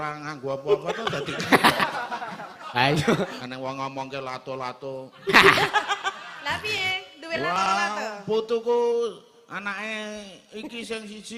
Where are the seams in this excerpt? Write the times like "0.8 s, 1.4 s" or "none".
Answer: 3.4 s